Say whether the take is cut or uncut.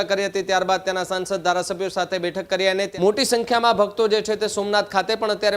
cut